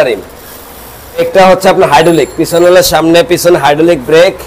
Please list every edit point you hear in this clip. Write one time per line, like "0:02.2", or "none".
0:01.2